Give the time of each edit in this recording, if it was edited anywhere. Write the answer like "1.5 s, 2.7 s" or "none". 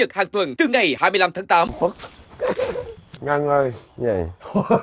1.7 s

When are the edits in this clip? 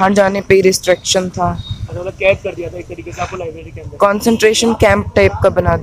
none

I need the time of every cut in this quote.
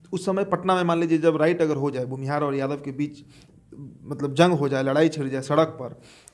none

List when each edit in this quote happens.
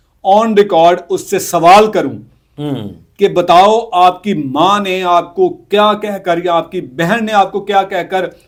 none

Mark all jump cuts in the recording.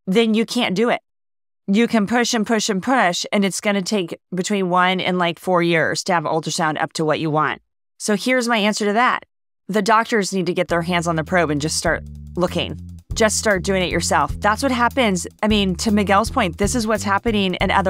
none

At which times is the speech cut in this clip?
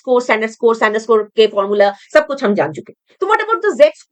none

